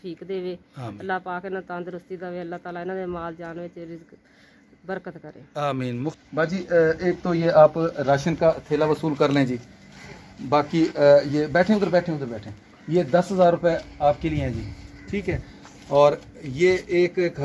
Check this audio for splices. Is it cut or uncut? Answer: cut